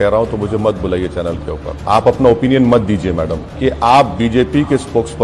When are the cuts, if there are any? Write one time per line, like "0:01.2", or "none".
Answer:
0:01.8
0:03.4